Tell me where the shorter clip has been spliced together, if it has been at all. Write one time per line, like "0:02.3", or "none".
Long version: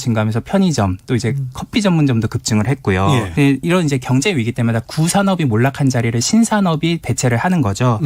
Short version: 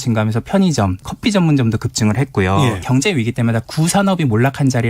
0:01.0
0:02.8